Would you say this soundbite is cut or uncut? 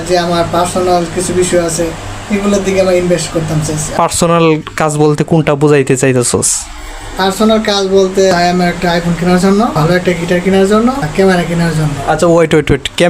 cut